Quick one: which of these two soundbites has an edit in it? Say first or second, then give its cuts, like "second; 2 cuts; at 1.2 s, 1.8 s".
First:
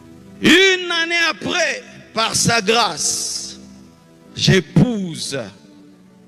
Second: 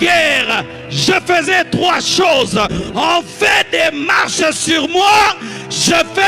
second; 1 cut; at 2.7 s